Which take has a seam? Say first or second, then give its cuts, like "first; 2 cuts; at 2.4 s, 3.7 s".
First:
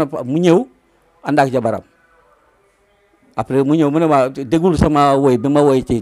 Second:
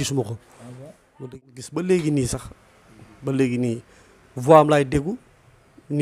second; 1 cut; at 1.4 s